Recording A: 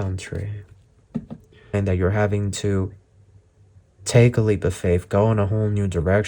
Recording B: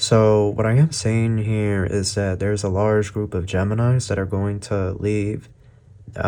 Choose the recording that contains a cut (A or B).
A